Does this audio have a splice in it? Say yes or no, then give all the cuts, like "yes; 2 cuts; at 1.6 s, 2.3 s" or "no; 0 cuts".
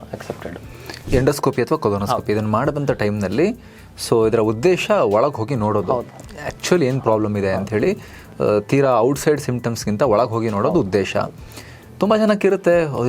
yes; 1 cut; at 1.1 s